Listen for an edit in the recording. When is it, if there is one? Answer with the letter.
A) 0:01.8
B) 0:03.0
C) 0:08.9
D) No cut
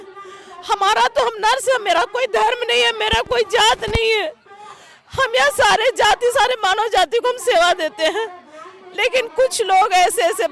D